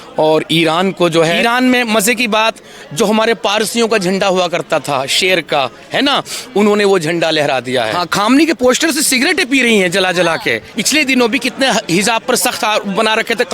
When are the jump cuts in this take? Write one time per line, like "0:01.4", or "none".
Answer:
0:01.4
0:08.0
0:10.8